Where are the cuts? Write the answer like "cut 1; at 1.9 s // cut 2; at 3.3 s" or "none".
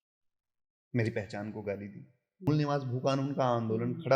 cut 1; at 2.5 s

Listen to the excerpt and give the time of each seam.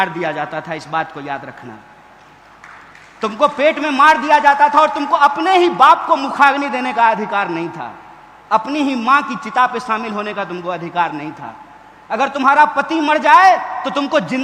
none

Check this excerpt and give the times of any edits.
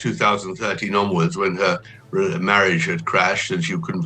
cut 1; at 1.9 s

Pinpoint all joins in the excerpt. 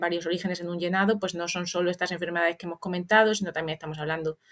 none

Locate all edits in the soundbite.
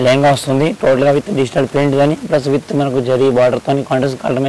none

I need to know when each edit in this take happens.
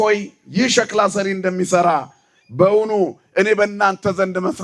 none

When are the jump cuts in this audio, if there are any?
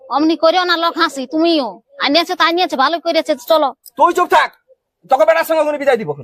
none

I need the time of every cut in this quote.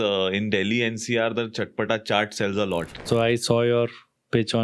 cut 1; at 3.0 s

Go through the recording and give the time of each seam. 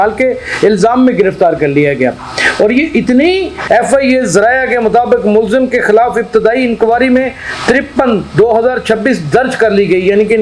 cut 1; at 3.5 s

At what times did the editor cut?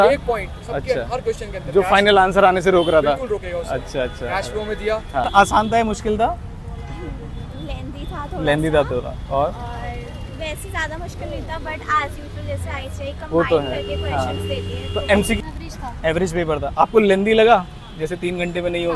cut 1; at 5.2 s // cut 2; at 15.4 s

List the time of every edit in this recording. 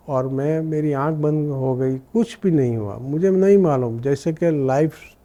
none

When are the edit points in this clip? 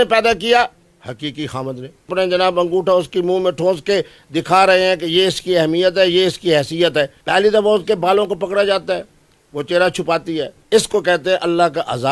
cut 1; at 2.1 s // cut 2; at 7.2 s // cut 3; at 10.5 s

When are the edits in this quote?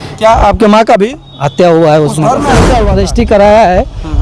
cut 1; at 2.8 s

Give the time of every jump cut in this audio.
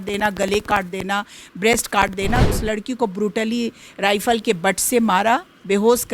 cut 1; at 2.5 s

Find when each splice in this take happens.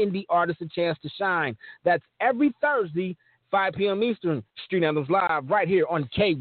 none

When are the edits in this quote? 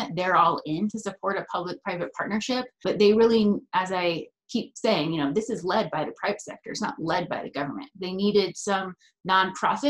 cut 1; at 2.8 s

